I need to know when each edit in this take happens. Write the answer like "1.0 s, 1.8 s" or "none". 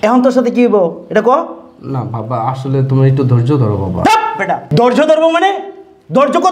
none